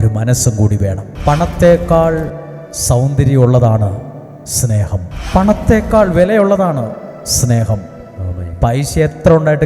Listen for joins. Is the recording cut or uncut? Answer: cut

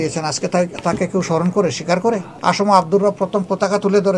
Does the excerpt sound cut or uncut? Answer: cut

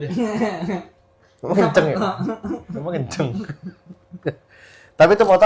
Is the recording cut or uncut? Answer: uncut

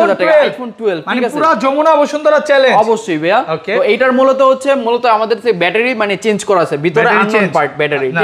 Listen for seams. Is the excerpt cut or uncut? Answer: uncut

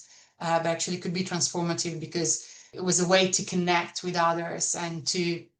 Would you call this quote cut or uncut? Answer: cut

